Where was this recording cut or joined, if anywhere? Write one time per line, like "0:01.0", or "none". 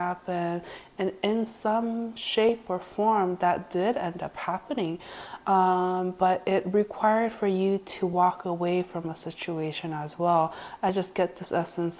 none